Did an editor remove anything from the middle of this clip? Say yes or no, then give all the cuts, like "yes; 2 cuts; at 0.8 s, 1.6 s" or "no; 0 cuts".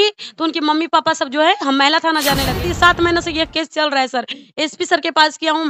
yes; 1 cut; at 2.6 s